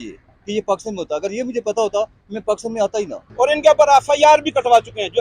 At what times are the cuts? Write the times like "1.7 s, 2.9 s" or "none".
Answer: 3.2 s